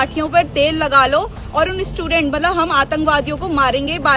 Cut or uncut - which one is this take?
uncut